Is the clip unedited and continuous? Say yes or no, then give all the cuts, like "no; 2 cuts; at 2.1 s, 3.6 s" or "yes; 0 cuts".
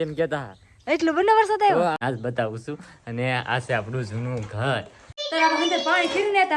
no; 2 cuts; at 2.0 s, 5.2 s